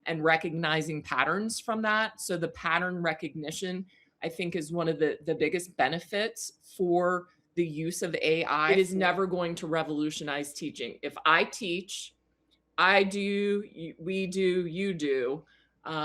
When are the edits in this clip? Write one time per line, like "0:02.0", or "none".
0:08.6